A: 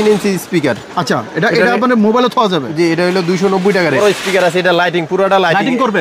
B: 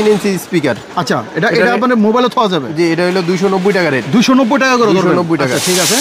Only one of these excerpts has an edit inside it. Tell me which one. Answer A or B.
A